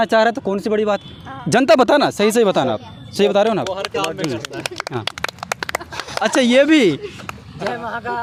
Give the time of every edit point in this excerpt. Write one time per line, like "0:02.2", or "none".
none

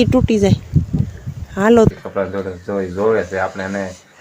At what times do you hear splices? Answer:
0:01.9

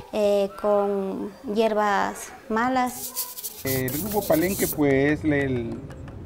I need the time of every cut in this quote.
0:03.7

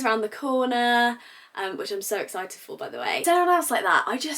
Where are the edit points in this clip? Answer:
0:03.2

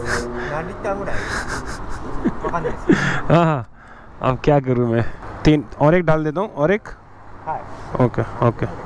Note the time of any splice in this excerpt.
none

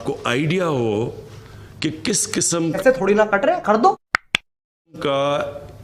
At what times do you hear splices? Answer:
0:02.8
0:04.9

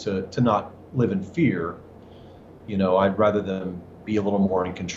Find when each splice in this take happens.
none

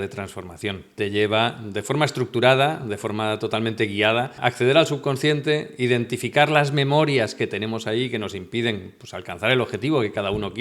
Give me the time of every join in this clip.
0:01.0
0:04.3

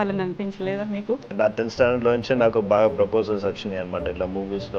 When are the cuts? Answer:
0:01.3

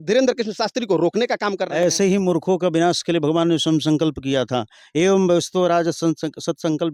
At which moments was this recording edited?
none

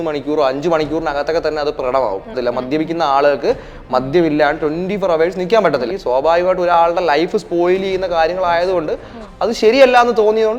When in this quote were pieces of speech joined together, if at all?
0:02.3
0:05.9

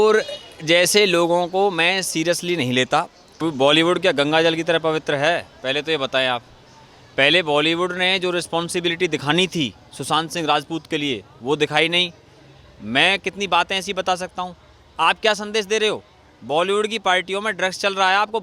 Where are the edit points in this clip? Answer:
0:03.4

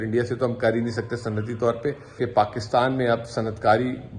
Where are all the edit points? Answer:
0:02.2

